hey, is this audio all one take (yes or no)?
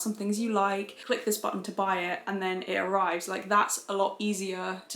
no